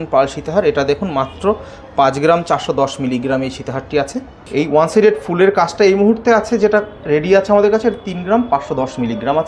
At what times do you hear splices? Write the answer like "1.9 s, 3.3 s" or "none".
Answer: 4.5 s

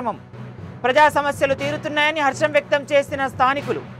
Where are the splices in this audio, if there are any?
none

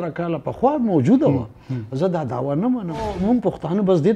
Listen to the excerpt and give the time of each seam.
3.1 s

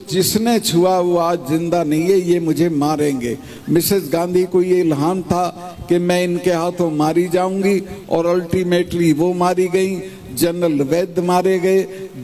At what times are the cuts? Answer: none

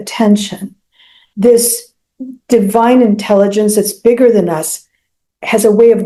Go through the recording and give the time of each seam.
none

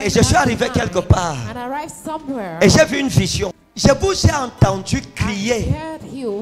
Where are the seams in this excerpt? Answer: 3.6 s

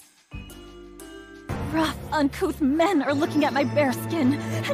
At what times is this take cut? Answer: 1.5 s

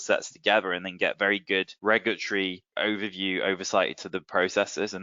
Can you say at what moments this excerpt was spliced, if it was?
1.7 s, 2.7 s

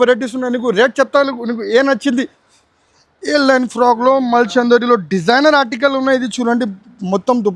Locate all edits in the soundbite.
2.4 s

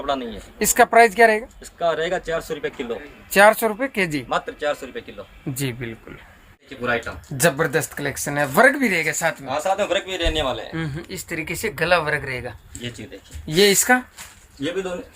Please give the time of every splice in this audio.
6.6 s

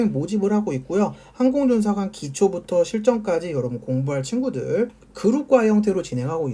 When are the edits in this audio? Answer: 5.0 s

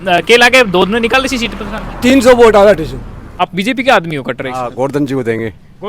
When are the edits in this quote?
3.3 s

